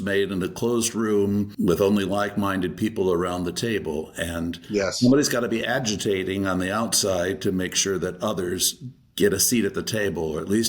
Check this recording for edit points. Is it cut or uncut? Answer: cut